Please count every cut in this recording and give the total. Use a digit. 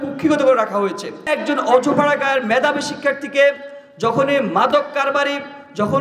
1